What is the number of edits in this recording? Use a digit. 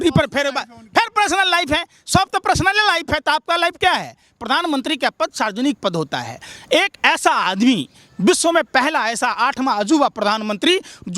0